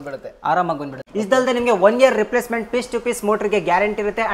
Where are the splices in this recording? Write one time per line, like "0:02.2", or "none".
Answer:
0:01.0